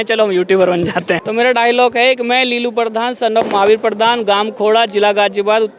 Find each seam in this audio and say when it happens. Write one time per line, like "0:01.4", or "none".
0:01.2